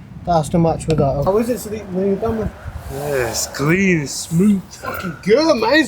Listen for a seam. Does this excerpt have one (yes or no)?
yes